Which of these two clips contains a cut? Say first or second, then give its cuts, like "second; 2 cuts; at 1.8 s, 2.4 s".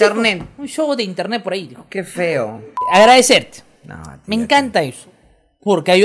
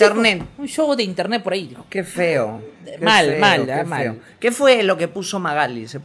first; 1 cut; at 2.8 s